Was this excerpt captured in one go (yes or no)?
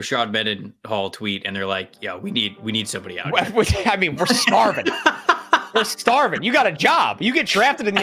yes